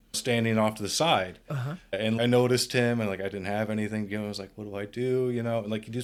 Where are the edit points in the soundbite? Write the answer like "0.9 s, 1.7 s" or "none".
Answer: none